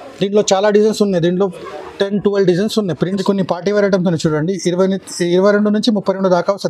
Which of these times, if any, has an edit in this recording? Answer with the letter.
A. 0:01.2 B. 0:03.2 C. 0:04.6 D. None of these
B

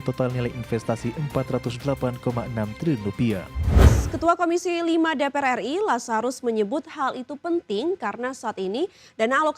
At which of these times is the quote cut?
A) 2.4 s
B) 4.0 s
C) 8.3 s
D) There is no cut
B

